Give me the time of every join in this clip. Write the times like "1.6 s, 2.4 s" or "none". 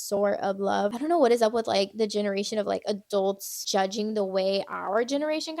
0.9 s, 3.6 s